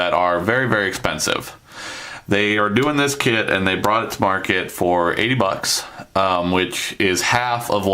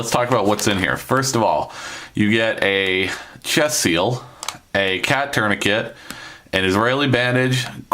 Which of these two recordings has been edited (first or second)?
second